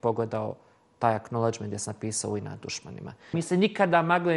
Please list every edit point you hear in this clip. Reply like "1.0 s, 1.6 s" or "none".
3.4 s